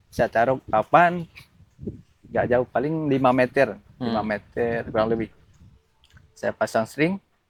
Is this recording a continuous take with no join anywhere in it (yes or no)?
yes